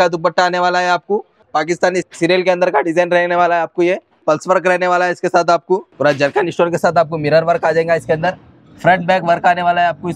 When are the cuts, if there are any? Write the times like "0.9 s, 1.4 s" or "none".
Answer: 1.5 s, 4.2 s, 5.9 s

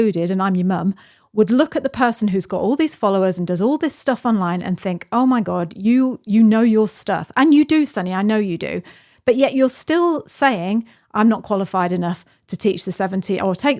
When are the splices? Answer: none

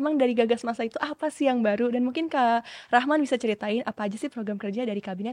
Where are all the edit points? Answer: none

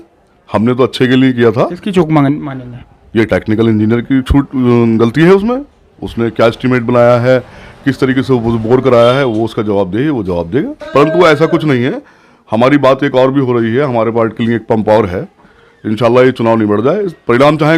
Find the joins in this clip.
10.8 s

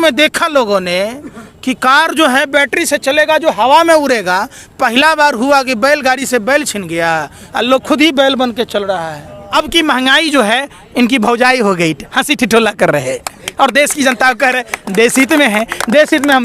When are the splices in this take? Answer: 9.4 s

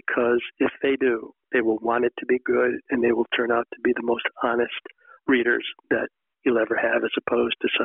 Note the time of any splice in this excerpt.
1.3 s

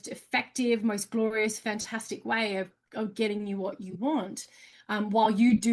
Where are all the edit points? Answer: none

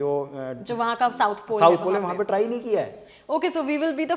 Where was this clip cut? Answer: none

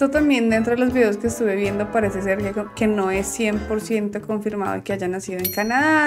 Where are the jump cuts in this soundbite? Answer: none

